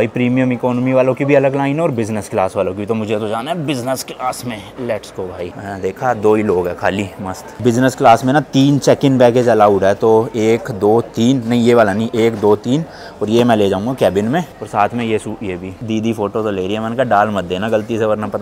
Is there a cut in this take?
no; 0 cuts

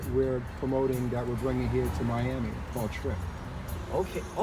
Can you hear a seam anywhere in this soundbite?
no; 0 cuts

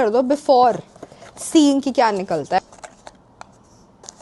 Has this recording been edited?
yes; 1 cut; at 2.6 s

